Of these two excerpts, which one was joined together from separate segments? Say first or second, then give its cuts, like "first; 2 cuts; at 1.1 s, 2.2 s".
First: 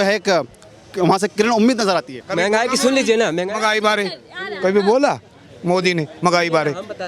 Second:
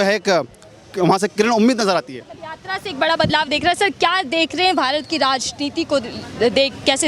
first; 1 cut; at 2.2 s